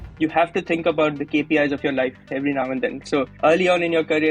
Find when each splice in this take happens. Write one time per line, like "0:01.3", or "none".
0:01.2
0:03.0